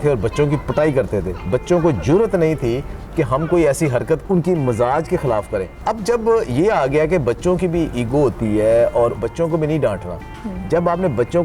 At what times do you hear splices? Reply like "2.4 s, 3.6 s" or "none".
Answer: 4.2 s, 5.8 s, 9.2 s